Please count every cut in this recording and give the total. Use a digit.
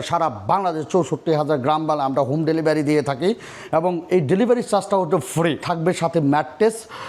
1